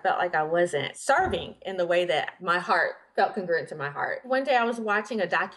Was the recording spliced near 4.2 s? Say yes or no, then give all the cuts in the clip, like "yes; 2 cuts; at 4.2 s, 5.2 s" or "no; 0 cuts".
yes; 3 cuts; at 0.9 s, 2.4 s, 4.2 s